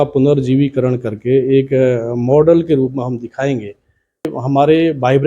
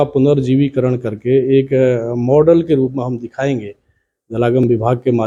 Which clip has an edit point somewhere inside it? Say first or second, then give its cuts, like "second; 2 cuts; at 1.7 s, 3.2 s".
first; 1 cut; at 4.3 s